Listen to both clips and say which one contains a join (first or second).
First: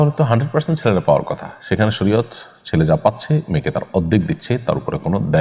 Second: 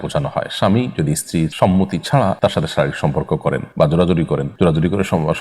second